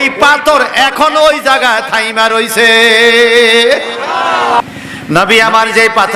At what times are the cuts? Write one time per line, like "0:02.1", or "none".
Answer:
0:04.6